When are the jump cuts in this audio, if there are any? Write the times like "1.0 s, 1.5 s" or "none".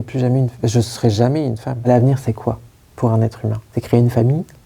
1.7 s, 3.6 s